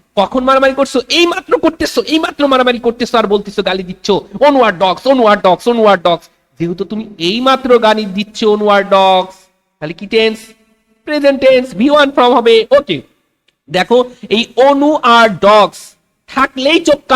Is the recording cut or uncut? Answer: uncut